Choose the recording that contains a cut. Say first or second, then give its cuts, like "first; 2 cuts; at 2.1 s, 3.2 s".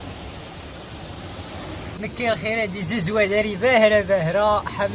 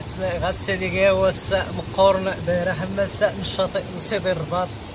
first; 1 cut; at 1.9 s